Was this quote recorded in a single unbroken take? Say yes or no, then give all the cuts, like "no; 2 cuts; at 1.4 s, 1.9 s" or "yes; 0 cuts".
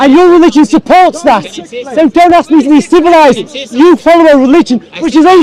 yes; 0 cuts